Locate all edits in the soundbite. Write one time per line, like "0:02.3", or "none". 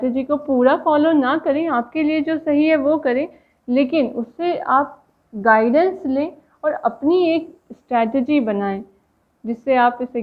none